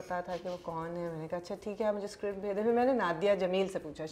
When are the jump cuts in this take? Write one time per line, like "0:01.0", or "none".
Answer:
none